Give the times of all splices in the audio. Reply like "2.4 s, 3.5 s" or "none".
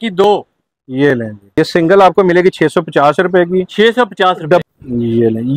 1.4 s, 4.6 s